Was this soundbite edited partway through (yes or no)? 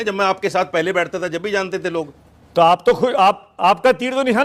no